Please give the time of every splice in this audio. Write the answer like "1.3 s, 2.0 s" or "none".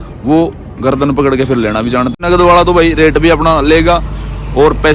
2.2 s